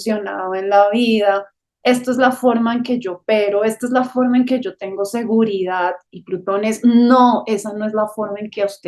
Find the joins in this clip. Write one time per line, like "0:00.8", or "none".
none